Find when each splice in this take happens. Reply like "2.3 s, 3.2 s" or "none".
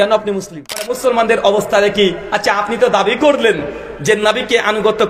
0.9 s

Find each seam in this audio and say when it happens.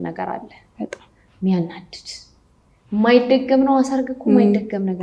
none

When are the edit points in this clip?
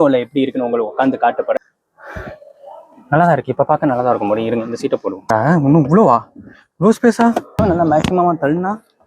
1.6 s, 5.3 s, 7.6 s

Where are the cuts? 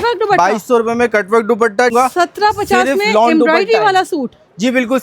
1.9 s

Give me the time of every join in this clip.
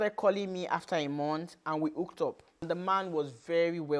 2.6 s

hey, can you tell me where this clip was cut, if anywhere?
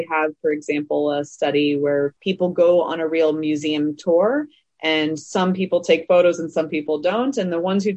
2.2 s

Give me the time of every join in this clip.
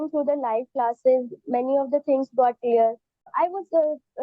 3.2 s

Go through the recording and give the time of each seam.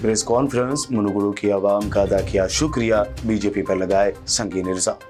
none

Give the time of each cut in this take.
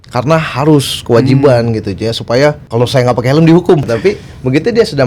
2.6 s, 3.9 s

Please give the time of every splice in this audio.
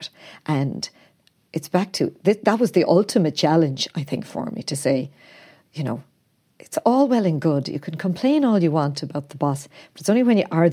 none

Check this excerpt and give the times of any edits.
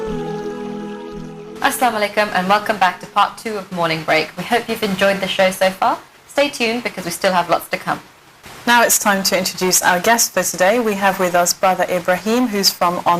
1.4 s

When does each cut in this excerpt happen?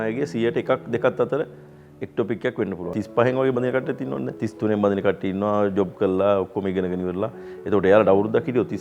2.9 s, 4.4 s

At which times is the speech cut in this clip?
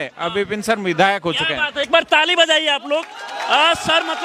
none

